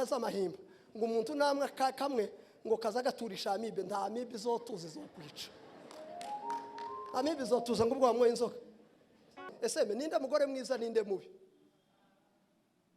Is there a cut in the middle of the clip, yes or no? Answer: yes